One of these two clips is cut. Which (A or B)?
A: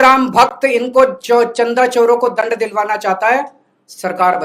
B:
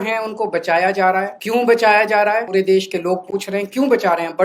B